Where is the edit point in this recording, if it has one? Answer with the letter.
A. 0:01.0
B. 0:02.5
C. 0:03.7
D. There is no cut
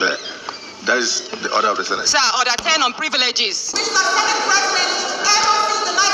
C